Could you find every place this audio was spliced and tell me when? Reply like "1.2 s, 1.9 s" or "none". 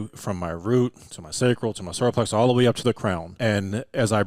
3.3 s